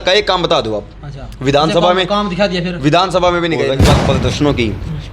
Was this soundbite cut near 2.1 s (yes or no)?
no